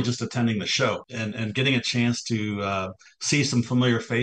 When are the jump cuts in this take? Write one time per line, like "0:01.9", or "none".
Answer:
0:01.1